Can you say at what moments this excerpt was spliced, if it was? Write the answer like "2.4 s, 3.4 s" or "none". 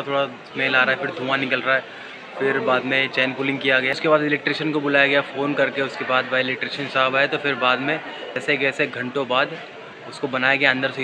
3.9 s, 8.4 s